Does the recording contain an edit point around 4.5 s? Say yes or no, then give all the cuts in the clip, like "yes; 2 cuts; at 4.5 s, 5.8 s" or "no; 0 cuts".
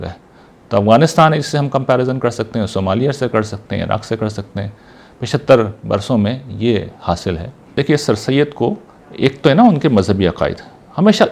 no; 1 cut; at 7.7 s